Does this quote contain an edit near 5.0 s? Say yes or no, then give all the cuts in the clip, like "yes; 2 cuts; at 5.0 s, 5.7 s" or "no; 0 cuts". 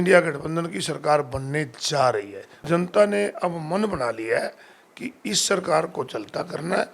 no; 1 cut; at 2.6 s